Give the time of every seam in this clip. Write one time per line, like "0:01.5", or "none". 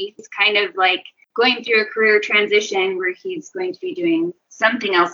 0:01.1